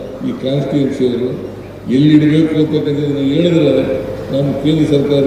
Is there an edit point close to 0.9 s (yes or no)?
no